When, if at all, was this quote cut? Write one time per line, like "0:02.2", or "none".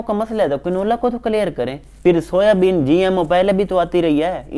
0:01.9